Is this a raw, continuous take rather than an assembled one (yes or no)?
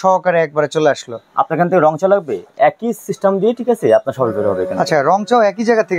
yes